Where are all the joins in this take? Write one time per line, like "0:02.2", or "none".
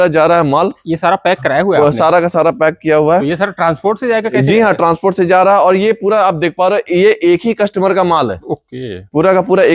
none